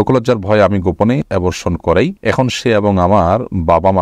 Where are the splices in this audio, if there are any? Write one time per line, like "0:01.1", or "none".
0:01.2
0:02.2